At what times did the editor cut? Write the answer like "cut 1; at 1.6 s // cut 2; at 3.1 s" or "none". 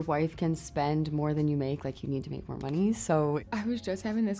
cut 1; at 3.4 s